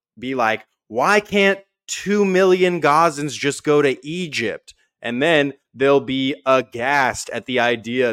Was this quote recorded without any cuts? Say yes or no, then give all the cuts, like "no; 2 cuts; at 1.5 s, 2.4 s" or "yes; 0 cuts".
yes; 0 cuts